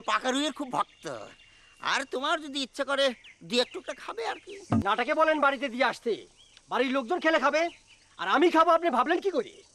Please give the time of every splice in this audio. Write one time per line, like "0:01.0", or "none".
0:04.8